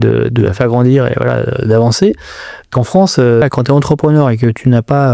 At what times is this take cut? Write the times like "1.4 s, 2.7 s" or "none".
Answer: 3.4 s